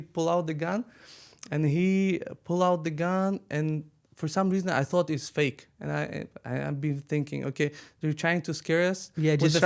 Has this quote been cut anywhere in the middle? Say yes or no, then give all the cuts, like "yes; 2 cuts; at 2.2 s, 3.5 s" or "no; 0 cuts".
no; 0 cuts